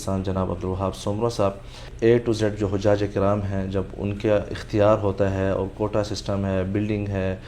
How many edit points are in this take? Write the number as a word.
one